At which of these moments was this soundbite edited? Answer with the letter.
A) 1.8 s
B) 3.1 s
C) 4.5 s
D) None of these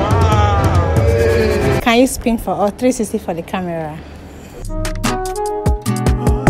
A